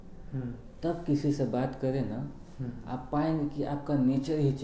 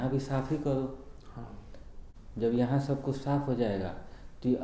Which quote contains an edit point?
second; 1 cut; at 2.0 s

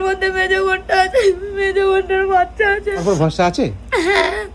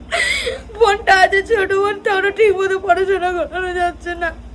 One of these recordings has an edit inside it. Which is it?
first; 1 cut; at 3.0 s

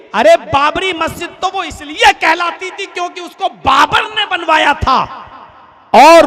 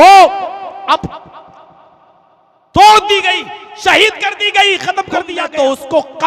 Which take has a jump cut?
second; 1 cut; at 5.2 s

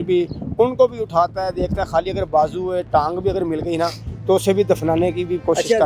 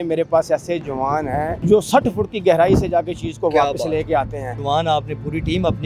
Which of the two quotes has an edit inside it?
second; 2 cuts; at 1.6 s, 4.5 s

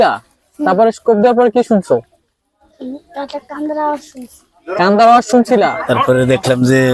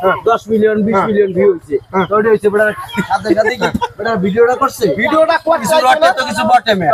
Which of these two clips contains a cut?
first; 1 cut; at 5.8 s

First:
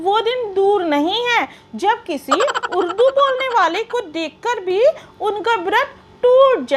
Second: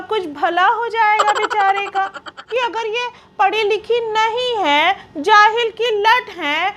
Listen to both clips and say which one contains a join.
second; 1 cut; at 2.4 s

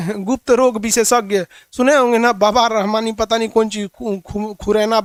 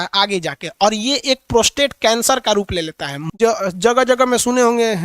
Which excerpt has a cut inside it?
second; 1 cut; at 3.1 s

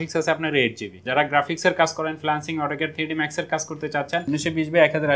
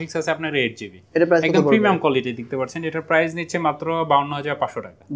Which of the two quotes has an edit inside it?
first; 2 cuts; at 0.9 s, 4.2 s

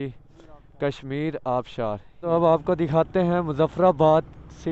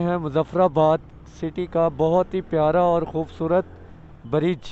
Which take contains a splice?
first; 1 cut; at 2.2 s

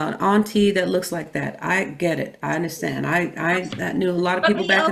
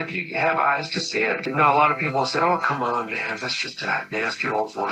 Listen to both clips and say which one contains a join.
second; 1 cut; at 1.5 s

